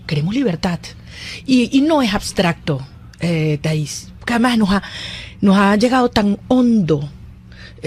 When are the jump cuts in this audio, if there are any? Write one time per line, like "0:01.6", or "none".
none